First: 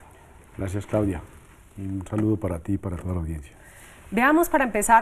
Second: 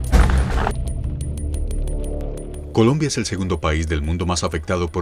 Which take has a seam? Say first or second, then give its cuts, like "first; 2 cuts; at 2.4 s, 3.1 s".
first; 1 cut; at 2.9 s